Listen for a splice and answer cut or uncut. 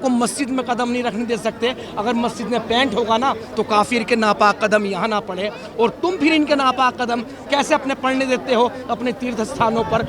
uncut